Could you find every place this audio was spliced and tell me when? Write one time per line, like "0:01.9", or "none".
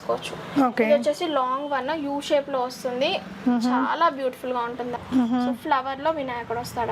0:05.0

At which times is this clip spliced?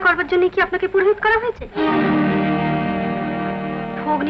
none

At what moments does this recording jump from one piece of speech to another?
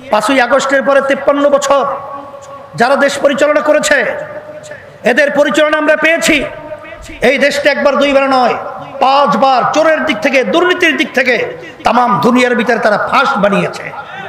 none

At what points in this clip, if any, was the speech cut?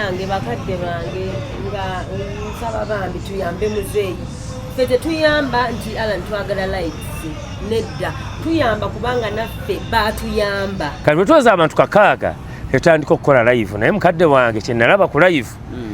0:11.0

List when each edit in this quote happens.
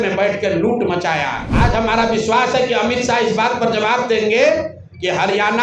0:01.5

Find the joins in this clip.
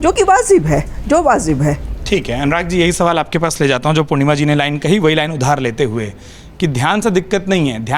none

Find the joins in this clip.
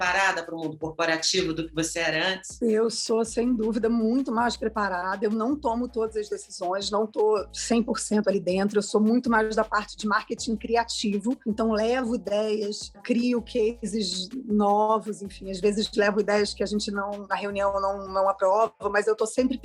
none

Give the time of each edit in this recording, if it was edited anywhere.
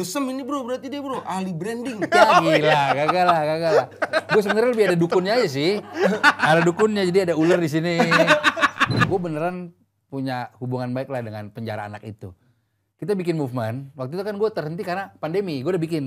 0:09.0

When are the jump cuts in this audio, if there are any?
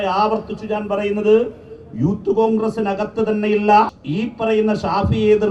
0:04.0

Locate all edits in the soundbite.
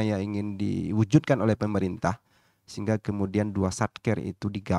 none

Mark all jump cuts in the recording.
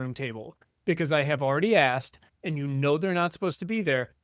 none

